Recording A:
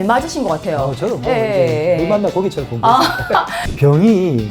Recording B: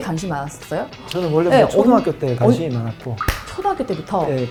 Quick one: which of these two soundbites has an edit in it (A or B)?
A